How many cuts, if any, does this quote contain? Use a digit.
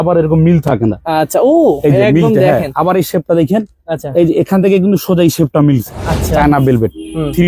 1